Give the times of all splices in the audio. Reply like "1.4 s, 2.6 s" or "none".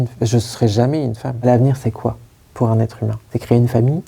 1.3 s, 3.2 s